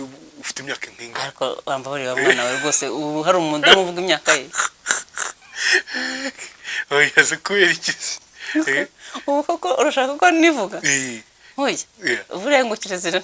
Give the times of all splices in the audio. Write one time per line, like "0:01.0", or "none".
none